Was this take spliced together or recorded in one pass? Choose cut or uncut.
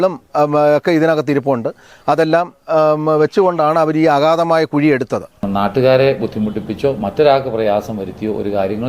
cut